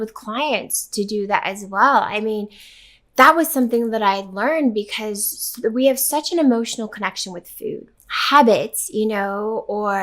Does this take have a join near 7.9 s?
yes; 1 cut; at 7.9 s

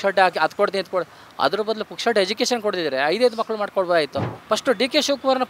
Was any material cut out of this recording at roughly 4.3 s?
yes; 1 cut; at 4.3 s

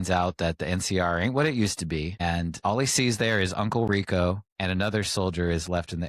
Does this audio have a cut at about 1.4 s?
no; 1 cut; at 4.5 s

